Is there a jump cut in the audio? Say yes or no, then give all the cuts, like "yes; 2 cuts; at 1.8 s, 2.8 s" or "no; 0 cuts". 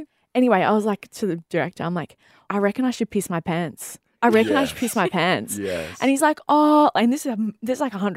yes; 1 cut; at 2.5 s